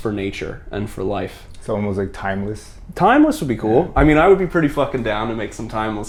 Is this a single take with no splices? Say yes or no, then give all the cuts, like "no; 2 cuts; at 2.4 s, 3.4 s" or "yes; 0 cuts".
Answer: yes; 0 cuts